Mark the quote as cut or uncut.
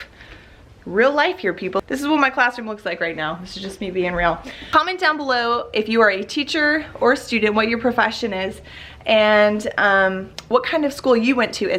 cut